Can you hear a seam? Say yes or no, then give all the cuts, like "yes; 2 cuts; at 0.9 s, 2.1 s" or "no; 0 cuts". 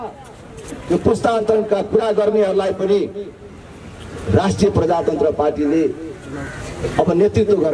no; 0 cuts